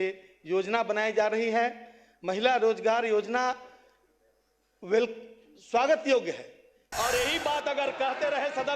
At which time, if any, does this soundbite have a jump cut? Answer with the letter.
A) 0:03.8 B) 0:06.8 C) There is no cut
B